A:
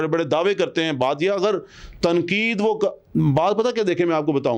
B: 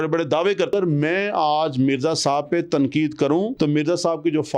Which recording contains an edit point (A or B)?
B